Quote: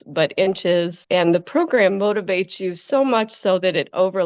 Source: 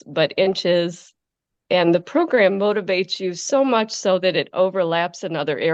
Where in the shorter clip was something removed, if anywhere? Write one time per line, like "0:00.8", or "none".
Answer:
0:01.0